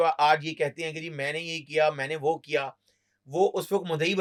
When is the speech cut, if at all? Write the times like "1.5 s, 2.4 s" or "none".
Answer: none